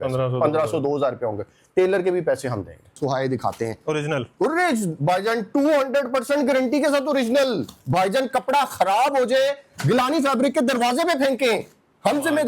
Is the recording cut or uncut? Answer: cut